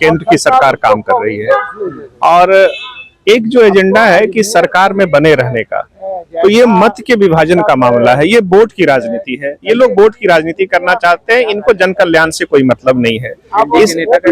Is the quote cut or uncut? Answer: uncut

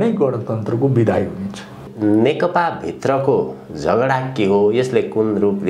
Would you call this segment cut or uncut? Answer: cut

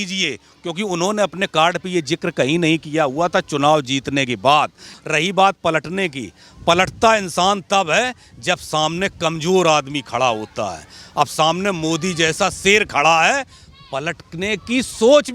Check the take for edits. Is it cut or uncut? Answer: cut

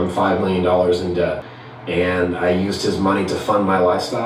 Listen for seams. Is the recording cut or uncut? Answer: uncut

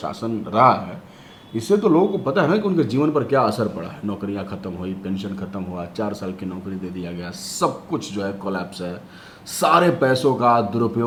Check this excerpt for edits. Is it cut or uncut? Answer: uncut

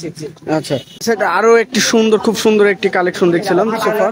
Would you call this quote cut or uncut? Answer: cut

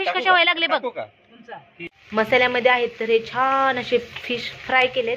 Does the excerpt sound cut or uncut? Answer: cut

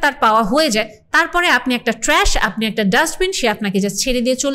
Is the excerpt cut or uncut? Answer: uncut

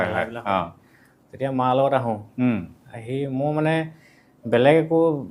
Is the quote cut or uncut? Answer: uncut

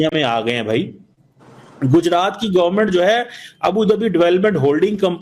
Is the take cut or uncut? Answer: uncut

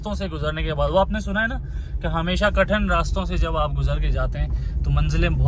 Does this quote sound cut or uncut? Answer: uncut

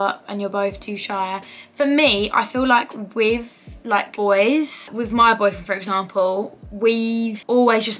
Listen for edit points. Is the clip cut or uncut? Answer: uncut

